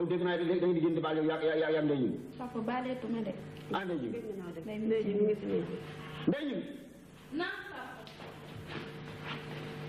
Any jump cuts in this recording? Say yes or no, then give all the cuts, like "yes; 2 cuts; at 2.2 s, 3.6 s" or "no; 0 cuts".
yes; 1 cut; at 8.8 s